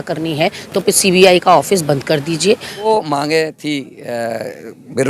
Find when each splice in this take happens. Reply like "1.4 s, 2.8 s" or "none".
2.9 s